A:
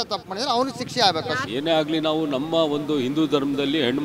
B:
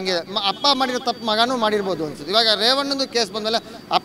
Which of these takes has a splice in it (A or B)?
A